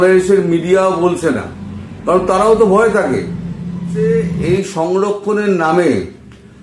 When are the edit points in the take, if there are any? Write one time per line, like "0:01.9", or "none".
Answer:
0:03.9